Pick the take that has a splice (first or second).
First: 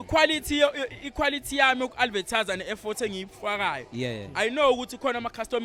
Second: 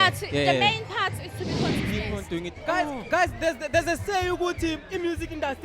second